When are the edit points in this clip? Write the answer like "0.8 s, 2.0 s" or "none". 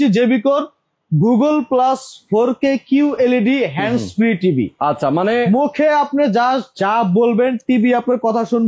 none